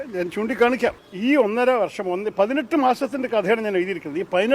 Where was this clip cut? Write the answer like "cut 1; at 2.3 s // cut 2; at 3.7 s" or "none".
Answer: cut 1; at 1.0 s